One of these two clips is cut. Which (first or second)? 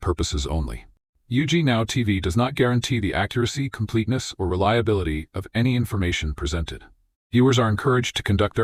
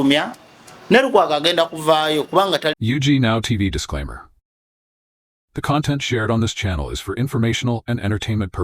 second